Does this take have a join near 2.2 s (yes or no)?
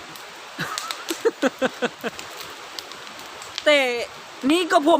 yes